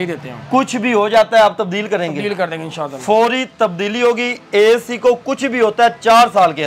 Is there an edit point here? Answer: no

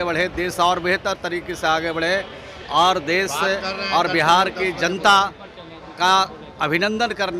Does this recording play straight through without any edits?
yes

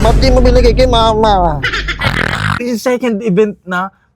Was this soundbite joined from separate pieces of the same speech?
yes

